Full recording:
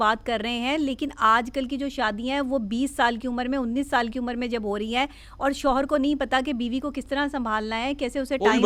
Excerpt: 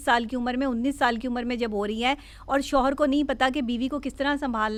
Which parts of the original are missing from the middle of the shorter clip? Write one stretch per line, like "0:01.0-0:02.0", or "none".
none